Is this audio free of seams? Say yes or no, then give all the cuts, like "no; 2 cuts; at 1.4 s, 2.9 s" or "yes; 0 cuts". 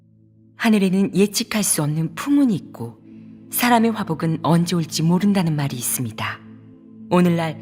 yes; 0 cuts